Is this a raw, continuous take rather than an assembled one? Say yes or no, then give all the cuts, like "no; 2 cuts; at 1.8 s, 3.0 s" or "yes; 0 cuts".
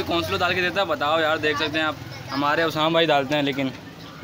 yes; 0 cuts